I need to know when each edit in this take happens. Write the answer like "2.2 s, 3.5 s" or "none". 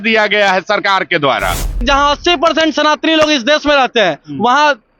1.8 s

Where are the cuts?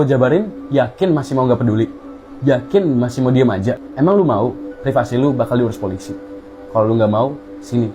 3.9 s

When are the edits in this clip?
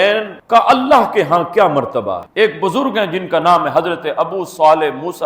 2.2 s

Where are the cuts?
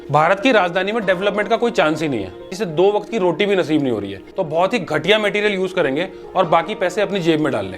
2.6 s, 4.3 s

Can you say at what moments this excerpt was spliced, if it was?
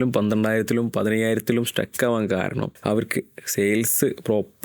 2.7 s

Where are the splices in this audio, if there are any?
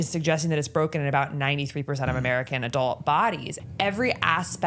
3.5 s

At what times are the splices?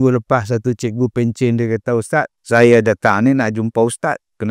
2.4 s

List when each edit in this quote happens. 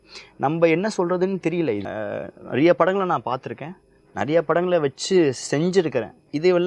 1.9 s

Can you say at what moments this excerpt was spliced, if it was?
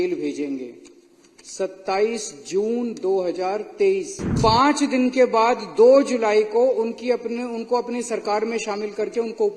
4.3 s

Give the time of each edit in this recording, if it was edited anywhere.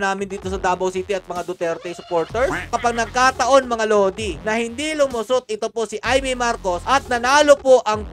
2.7 s

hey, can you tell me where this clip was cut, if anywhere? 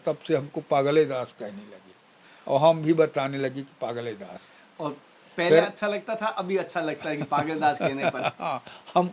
none

